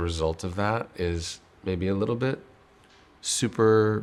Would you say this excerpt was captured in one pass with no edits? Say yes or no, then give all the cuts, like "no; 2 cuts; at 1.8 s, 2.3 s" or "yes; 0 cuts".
yes; 0 cuts